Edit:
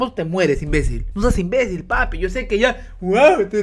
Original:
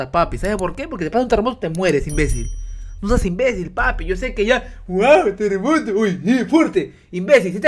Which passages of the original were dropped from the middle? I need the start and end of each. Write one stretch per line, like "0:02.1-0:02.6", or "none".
0:02.5-0:02.9